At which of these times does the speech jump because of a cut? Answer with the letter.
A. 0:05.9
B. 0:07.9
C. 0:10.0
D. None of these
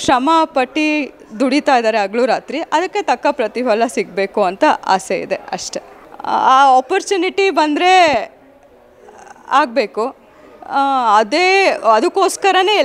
D